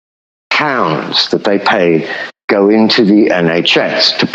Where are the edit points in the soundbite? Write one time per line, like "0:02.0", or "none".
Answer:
none